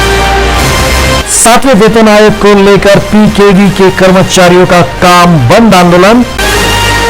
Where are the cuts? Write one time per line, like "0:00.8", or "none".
0:01.2

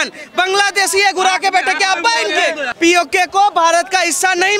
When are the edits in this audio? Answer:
0:02.7

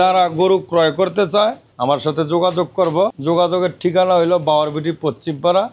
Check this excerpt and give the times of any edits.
0:01.7
0:03.2

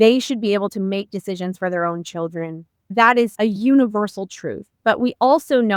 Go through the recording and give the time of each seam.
0:03.2

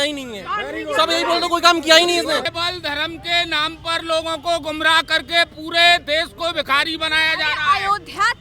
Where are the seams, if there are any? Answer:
0:02.5

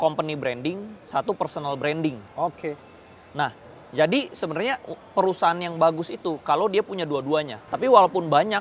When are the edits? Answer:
0:07.6

